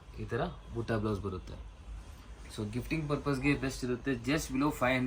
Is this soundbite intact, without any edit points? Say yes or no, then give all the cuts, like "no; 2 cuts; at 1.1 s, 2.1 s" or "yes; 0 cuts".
yes; 0 cuts